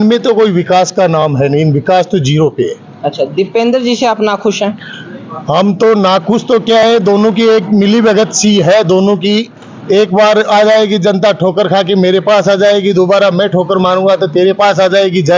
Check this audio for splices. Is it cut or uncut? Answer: uncut